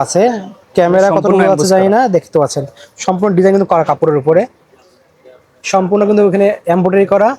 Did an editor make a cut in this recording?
no; 0 cuts

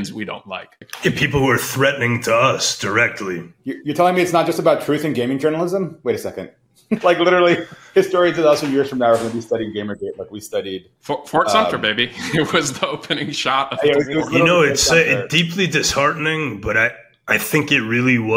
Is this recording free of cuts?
no; 2 cuts; at 3.5 s, 7.0 s

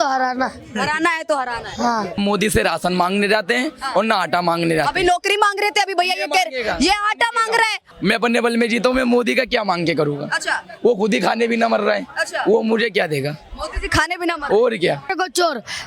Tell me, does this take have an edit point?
yes; 3 cuts; at 2.2 s, 7.8 s, 15.1 s

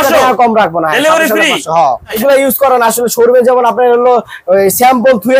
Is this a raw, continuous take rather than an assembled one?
no; 1 cut; at 2.1 s

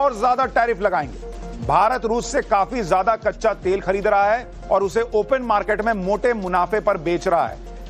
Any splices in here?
yes; 1 cut; at 4.0 s

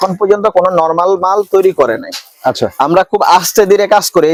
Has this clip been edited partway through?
no; 0 cuts

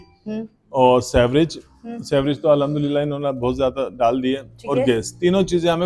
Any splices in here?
no; 0 cuts

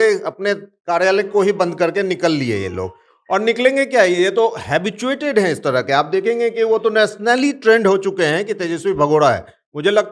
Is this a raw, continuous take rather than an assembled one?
yes; 0 cuts

